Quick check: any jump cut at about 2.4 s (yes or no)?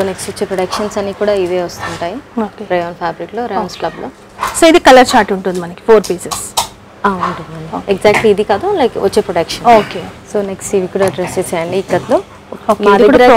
no